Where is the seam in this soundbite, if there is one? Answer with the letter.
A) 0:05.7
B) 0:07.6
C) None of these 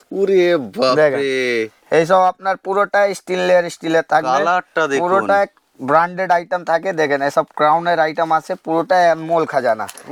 C